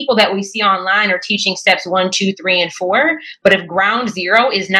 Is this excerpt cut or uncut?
uncut